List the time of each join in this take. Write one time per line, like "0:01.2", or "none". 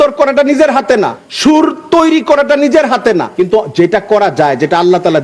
0:01.2
0:03.3